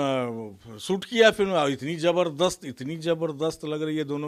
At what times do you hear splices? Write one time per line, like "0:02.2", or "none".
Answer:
none